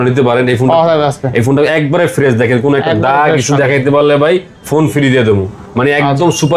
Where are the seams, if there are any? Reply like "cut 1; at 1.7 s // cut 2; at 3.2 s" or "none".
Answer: none

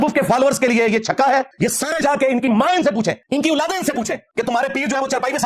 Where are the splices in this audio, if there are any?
cut 1; at 1.5 s // cut 2; at 3.2 s // cut 3; at 4.2 s

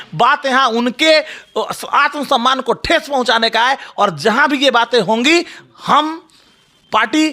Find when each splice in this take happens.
none

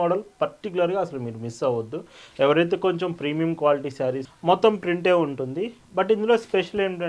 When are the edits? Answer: cut 1; at 4.3 s

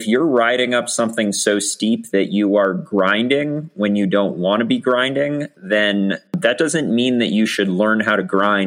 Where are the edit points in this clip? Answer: cut 1; at 6.4 s

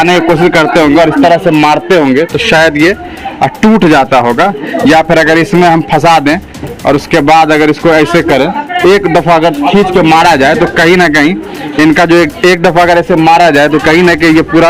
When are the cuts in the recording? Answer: none

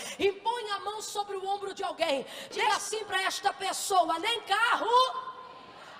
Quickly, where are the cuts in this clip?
cut 1; at 2.7 s

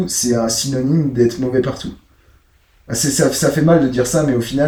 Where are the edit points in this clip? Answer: none

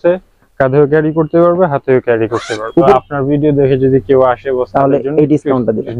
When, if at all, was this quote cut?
cut 1; at 2.9 s

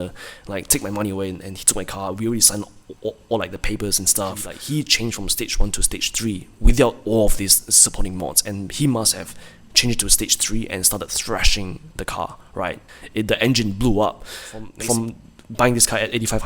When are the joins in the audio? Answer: cut 1; at 4.5 s // cut 2; at 11.9 s // cut 3; at 14.7 s

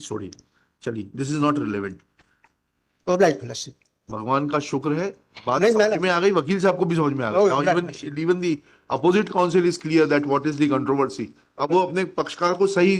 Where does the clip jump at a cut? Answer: none

